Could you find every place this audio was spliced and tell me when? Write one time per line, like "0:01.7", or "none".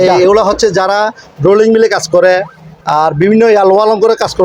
none